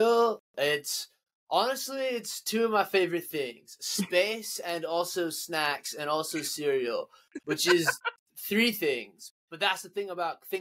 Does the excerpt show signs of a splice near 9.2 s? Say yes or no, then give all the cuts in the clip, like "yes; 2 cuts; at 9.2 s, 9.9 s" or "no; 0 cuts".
yes; 1 cut; at 9.2 s